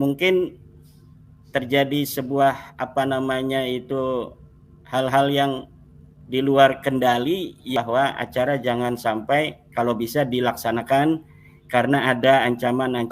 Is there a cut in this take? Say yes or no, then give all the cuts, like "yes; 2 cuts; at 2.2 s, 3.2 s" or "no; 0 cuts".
yes; 1 cut; at 7.7 s